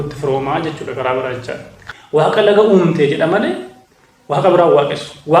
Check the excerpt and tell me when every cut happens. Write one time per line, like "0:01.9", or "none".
0:01.8